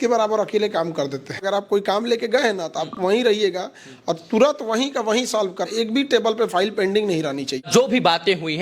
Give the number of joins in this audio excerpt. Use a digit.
3